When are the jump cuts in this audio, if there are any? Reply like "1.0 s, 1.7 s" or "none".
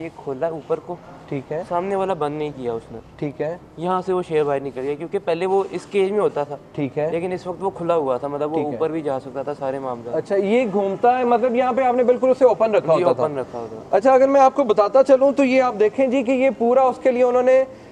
none